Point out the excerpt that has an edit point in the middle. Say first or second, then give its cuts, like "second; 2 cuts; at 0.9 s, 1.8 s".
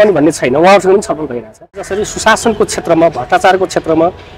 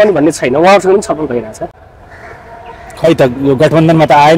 first; 1 cut; at 1.9 s